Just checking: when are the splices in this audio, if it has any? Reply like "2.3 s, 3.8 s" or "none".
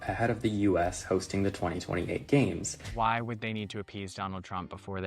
2.9 s

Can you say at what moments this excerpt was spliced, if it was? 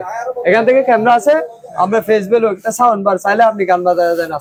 none

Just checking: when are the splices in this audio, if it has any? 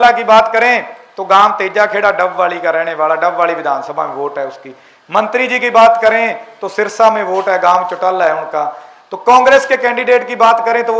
none

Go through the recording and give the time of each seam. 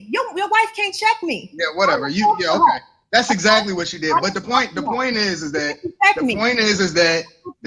none

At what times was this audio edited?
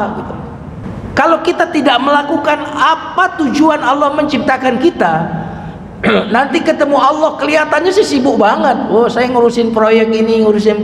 0.9 s

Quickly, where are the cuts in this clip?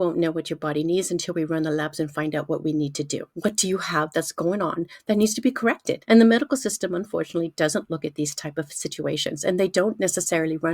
3.1 s, 5.9 s

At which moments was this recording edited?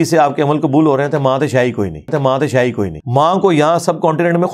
3.0 s

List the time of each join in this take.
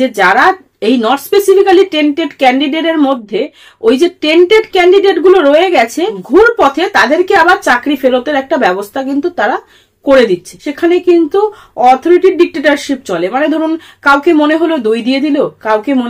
6.2 s, 10.6 s

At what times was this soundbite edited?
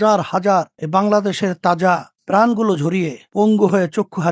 3.2 s

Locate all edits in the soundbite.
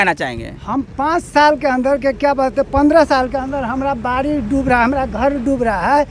none

